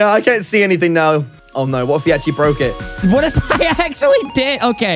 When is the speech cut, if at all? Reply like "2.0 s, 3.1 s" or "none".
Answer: 1.4 s, 3.0 s